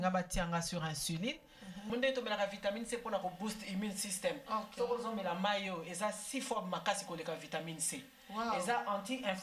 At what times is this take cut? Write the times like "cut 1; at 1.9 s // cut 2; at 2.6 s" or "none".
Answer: cut 1; at 1.8 s